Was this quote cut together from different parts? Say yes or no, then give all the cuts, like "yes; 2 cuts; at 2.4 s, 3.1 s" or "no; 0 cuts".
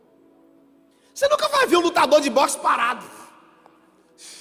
no; 0 cuts